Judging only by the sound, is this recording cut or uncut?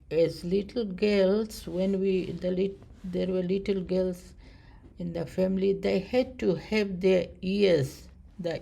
uncut